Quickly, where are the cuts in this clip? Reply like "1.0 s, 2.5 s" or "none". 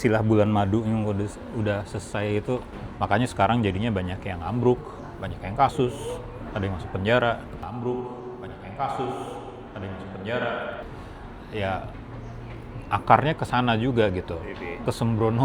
2.9 s, 7.6 s, 10.8 s, 14.4 s